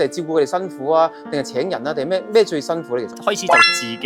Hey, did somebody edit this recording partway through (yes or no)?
yes